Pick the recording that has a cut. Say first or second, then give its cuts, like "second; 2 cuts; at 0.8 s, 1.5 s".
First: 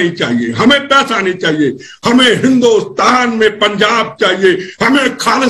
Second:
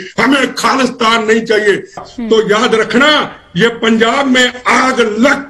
second; 1 cut; at 2.0 s